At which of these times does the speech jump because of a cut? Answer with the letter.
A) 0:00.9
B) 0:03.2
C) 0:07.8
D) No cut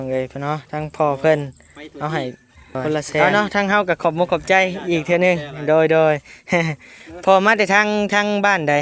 B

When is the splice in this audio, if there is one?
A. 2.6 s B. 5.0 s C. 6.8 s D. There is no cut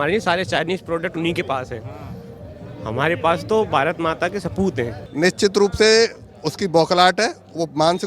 B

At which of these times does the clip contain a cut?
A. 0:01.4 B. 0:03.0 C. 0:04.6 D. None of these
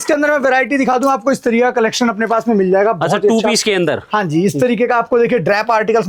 D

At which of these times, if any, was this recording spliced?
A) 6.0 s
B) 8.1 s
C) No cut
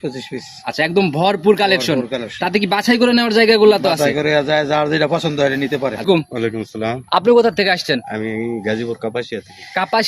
A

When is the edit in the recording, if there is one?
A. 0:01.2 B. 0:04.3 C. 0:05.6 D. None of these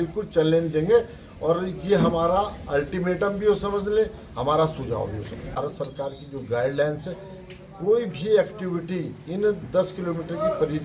C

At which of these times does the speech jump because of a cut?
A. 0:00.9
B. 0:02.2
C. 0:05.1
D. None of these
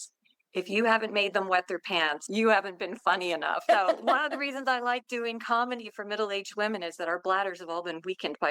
B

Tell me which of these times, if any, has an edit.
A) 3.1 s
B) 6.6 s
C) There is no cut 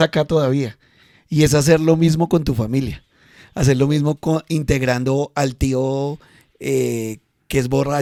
C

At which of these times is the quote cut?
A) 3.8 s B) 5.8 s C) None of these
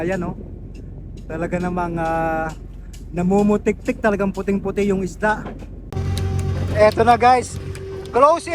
B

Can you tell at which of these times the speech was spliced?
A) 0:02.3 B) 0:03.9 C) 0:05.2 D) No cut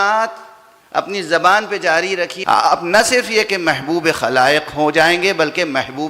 A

